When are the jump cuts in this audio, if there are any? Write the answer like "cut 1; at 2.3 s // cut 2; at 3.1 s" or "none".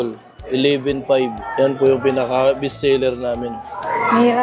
none